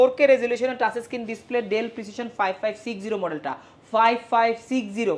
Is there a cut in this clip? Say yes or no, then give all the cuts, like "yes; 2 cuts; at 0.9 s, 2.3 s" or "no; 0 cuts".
no; 0 cuts